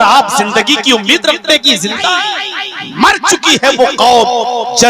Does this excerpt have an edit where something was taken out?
yes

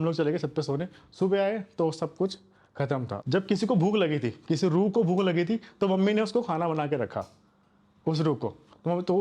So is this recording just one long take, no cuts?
no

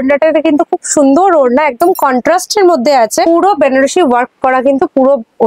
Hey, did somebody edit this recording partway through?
no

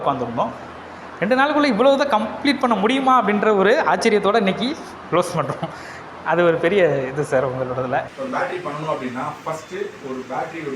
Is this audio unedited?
yes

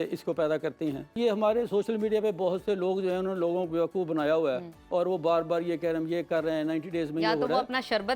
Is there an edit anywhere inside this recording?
yes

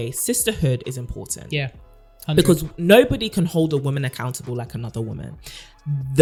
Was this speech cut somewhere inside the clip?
no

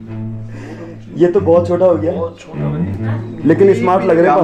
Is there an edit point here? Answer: no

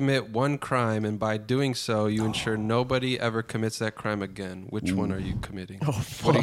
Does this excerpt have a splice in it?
no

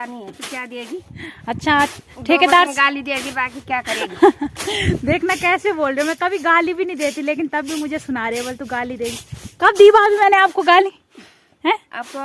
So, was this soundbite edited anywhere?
no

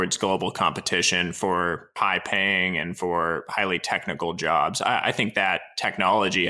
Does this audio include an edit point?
yes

